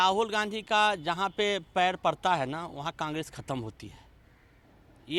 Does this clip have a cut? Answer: no; 0 cuts

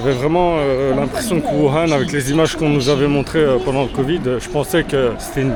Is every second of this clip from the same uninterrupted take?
yes; 0 cuts

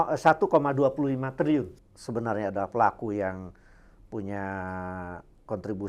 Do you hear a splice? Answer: yes; 1 cut; at 1.7 s

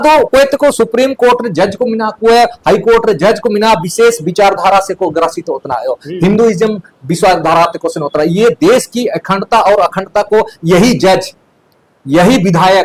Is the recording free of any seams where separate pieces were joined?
yes; 0 cuts

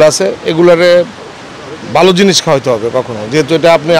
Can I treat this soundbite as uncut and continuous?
yes; 0 cuts

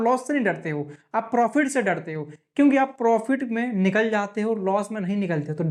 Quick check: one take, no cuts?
yes; 0 cuts

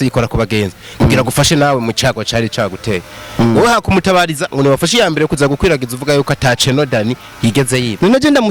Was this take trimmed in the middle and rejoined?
no; 0 cuts

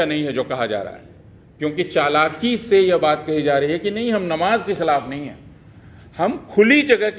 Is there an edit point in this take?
no; 0 cuts

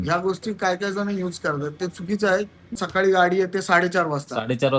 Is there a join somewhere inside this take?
yes; 1 cut; at 2.7 s

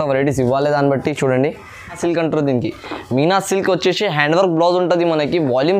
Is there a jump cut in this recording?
yes; 1 cut; at 2.0 s

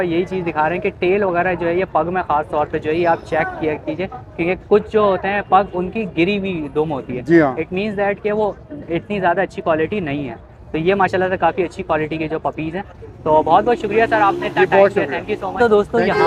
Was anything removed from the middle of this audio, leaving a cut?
no; 0 cuts

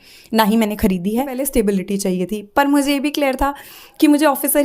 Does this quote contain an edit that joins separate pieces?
yes; 1 cut; at 1.4 s

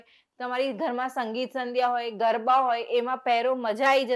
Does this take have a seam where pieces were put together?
no; 0 cuts

